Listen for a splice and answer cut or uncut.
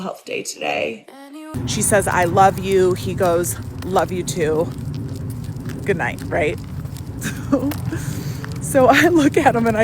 cut